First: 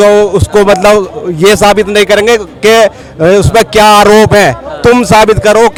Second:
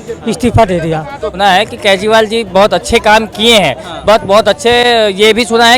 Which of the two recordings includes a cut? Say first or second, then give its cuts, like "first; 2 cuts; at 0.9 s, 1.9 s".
second; 1 cut; at 1.3 s